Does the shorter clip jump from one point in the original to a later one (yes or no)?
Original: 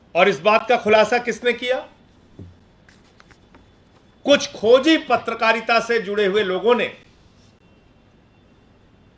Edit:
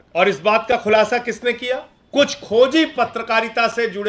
yes